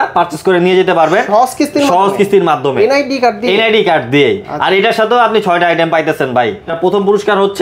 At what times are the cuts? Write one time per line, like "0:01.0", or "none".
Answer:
0:06.7